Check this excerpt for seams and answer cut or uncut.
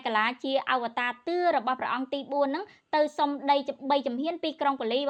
uncut